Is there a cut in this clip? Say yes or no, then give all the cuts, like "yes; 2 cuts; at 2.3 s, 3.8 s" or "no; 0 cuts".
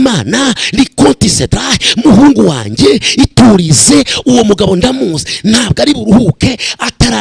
no; 0 cuts